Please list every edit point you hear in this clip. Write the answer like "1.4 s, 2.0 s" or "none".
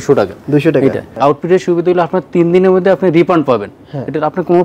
1.1 s